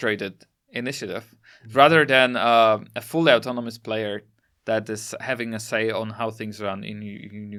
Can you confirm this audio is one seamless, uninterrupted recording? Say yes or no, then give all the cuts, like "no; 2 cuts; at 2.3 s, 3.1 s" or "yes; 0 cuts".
yes; 0 cuts